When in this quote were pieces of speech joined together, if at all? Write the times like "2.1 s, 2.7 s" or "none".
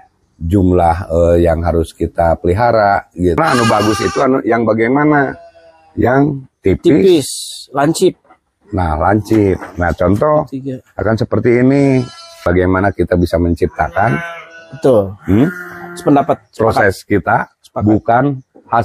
3.4 s, 12.2 s